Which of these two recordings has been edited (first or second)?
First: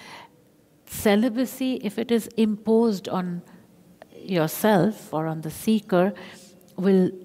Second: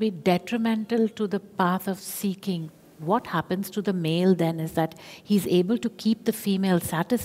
second